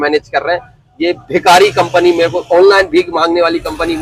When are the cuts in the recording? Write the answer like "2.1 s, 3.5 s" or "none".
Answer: none